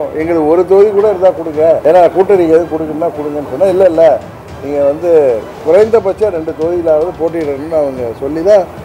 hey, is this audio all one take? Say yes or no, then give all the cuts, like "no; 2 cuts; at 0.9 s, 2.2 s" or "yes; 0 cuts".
no; 1 cut; at 1.8 s